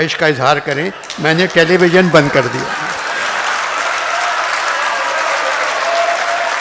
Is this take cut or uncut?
uncut